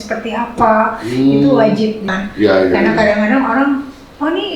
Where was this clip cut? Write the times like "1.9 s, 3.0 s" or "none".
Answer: 2.1 s